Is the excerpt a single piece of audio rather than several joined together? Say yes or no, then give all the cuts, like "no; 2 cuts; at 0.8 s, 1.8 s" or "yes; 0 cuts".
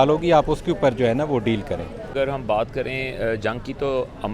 no; 1 cut; at 2.0 s